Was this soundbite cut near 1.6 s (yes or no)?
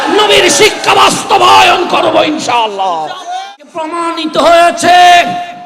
no